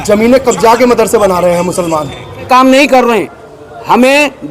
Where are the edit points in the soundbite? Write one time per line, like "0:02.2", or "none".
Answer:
0:02.5

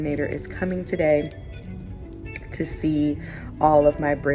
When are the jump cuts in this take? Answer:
none

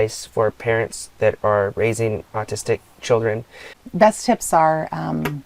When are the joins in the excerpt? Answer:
0:03.8

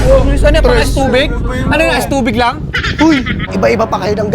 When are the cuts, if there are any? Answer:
0:03.4

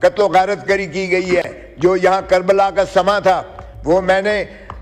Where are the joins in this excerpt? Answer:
none

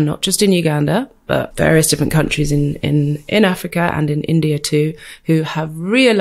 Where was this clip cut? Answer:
0:01.5

